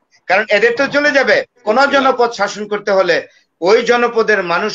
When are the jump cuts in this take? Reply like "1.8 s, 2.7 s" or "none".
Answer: 1.6 s

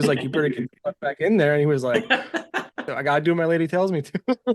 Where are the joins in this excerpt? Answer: 2.9 s

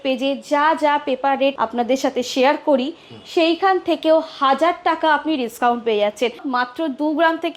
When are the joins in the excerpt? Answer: 6.4 s

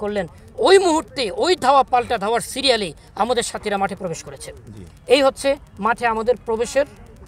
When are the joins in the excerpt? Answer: none

